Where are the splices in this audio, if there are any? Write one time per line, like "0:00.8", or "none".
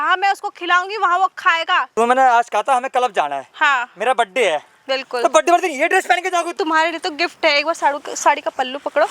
0:01.9
0:06.6